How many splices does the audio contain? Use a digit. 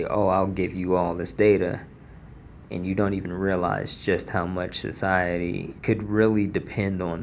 1